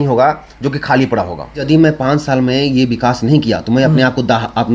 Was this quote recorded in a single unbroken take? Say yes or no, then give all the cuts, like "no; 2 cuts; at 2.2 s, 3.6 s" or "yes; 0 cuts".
no; 1 cut; at 1.6 s